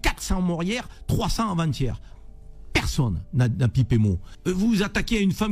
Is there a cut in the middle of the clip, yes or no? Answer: yes